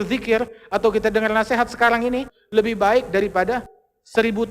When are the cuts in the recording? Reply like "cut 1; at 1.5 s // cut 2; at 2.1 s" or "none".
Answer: cut 1; at 2.4 s